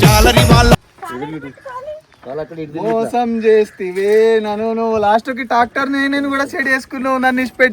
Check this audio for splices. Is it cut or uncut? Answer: cut